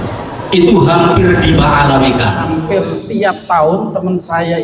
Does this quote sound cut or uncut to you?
cut